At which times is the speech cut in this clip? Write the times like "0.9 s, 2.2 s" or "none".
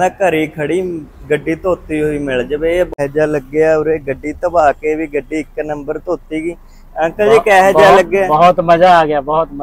2.9 s